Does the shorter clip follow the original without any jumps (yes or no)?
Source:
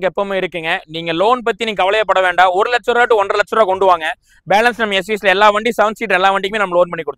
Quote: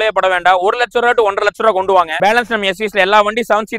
no